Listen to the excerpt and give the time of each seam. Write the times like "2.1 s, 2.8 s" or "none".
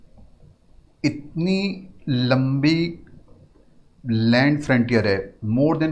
none